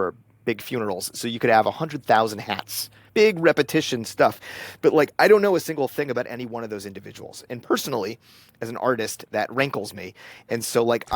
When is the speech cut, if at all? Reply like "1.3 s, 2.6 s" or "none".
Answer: 3.0 s